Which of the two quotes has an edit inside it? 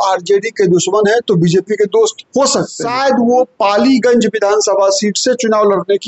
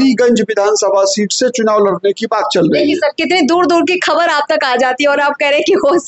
first; 1 cut; at 2.8 s

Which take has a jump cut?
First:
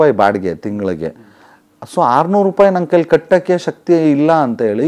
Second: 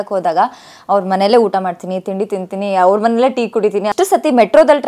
second; 1 cut; at 3.9 s

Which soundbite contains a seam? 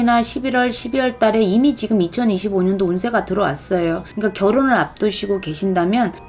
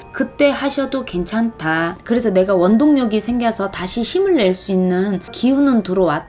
second; 2 cuts; at 2.0 s, 5.3 s

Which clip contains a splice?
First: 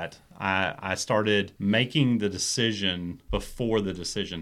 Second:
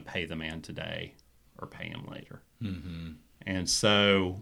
first; 2 cuts; at 1.5 s, 3.2 s

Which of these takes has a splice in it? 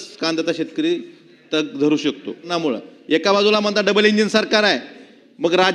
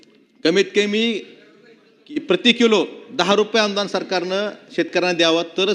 first; 1 cut; at 2.5 s

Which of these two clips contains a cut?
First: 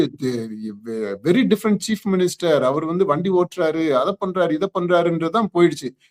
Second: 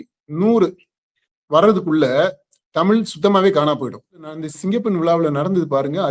second; 1 cut; at 4.4 s

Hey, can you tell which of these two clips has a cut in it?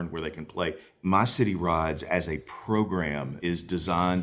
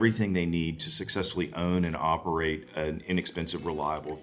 first; 2 cuts; at 1.0 s, 3.4 s

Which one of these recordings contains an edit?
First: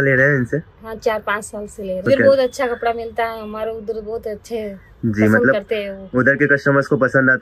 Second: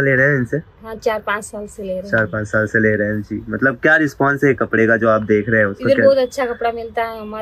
first; 1 cut; at 2.0 s

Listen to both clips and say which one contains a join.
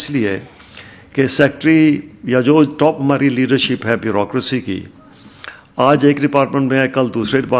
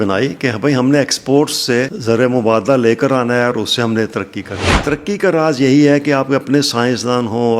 second; 2 cuts; at 1.9 s, 4.6 s

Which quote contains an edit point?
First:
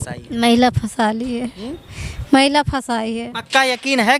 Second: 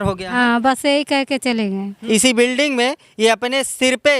second; 1 cut; at 1.9 s

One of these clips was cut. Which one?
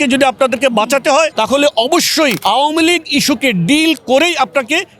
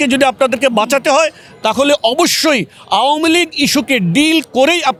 first; 2 cuts; at 1.3 s, 2.4 s

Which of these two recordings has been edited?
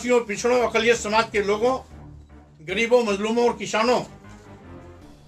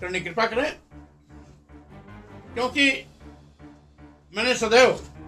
first; 1 cut; at 4.1 s

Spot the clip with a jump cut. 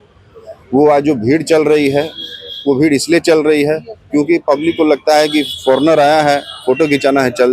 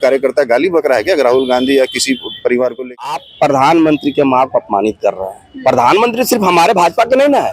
second; 1 cut; at 3.3 s

